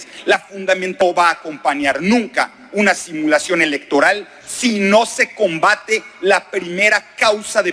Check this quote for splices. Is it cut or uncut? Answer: cut